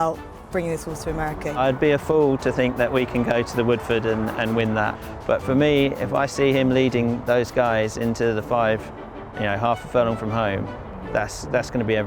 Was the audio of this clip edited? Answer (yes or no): yes